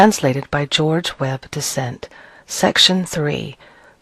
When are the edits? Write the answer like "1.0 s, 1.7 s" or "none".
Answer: 1.7 s